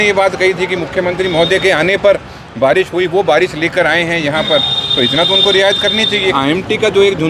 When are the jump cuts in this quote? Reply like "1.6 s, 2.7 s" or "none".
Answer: 6.3 s